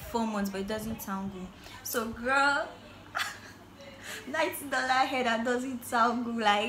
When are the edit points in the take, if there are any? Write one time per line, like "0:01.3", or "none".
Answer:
none